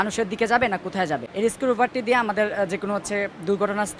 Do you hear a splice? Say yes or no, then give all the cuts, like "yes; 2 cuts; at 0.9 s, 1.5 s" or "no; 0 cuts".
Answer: yes; 1 cut; at 1.3 s